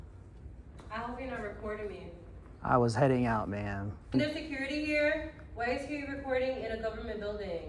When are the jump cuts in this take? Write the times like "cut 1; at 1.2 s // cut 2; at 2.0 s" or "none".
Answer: cut 1; at 4.1 s